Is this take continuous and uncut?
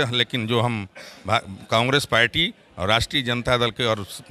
yes; 0 cuts

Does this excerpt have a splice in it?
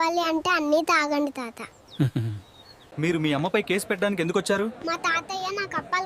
yes; 1 cut; at 2.8 s

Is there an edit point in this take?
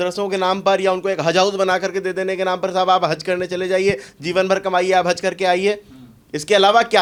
no; 0 cuts

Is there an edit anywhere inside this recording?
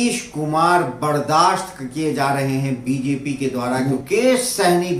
yes; 1 cut; at 3.8 s

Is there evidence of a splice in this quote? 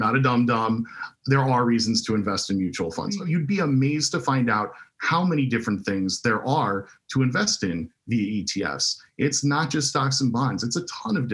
yes; 1 cut; at 3.1 s

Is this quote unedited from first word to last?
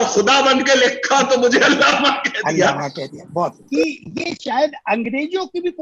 no; 1 cut; at 3.6 s

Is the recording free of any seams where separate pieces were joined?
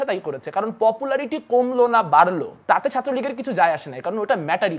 no; 1 cut; at 2.5 s

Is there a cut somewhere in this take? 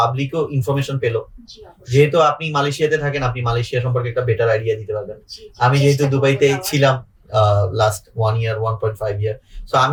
no; 0 cuts

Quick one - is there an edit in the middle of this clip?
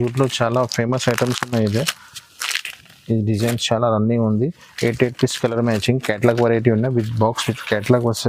no; 0 cuts

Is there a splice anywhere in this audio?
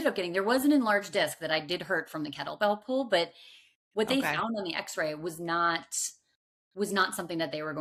no; 0 cuts

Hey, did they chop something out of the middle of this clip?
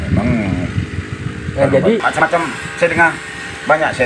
yes; 1 cut; at 2.1 s

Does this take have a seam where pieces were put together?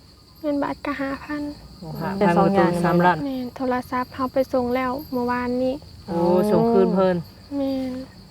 yes; 1 cut; at 3.2 s

